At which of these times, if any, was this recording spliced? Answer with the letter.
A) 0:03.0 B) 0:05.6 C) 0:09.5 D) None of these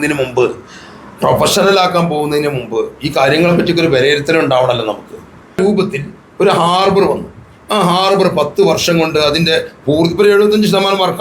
B